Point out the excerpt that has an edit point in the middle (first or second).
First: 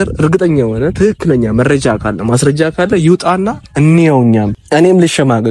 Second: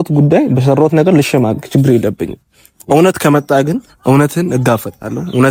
first